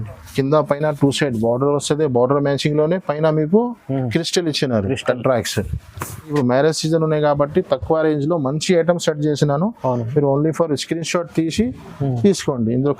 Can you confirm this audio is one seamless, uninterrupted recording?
no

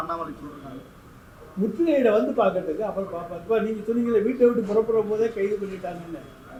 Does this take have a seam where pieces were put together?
no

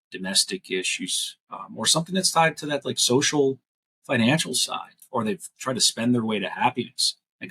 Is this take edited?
yes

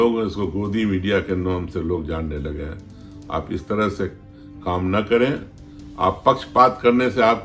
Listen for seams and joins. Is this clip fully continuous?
yes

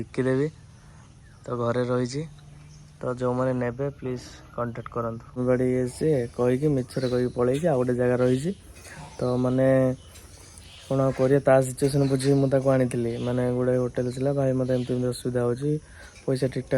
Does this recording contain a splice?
yes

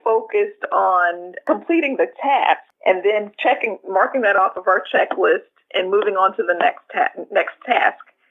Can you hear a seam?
yes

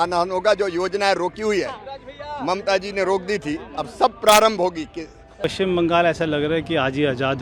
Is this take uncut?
no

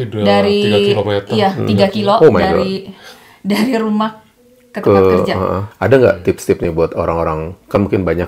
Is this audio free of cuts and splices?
no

